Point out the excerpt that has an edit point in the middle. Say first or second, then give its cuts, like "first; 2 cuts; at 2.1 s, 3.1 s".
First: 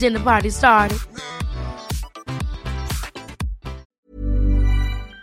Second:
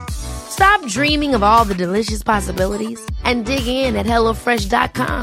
first; 1 cut; at 3.9 s